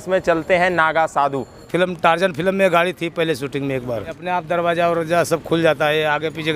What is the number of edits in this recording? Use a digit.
2